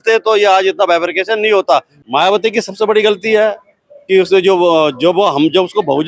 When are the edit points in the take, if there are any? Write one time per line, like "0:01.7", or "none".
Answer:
0:01.9